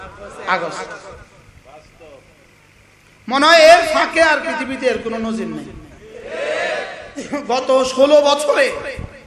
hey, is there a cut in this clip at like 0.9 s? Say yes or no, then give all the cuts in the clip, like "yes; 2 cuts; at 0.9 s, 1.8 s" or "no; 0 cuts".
no; 1 cut; at 7.4 s